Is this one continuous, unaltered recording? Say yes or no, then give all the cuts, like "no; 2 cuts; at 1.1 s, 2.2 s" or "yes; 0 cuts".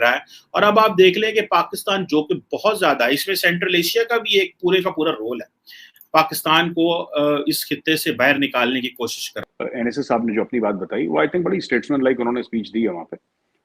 no; 1 cut; at 9.3 s